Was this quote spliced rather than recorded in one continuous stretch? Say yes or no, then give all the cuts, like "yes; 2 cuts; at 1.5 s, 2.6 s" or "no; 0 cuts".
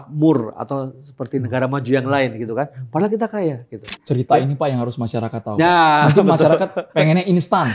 yes; 1 cut; at 4.0 s